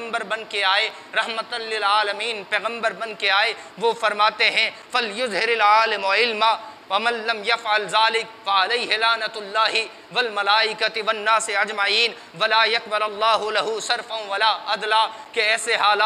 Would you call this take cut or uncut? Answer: uncut